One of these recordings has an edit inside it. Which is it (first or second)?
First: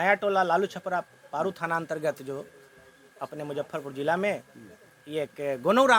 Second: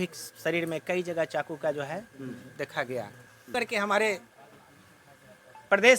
second